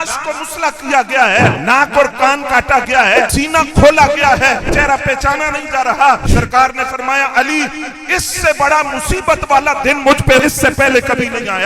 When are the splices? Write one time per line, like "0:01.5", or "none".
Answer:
0:01.6
0:03.3
0:04.7
0:06.2
0:10.4